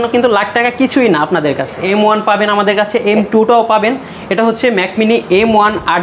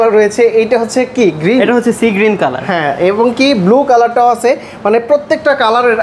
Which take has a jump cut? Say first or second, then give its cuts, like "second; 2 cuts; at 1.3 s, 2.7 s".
first; 1 cut; at 1.8 s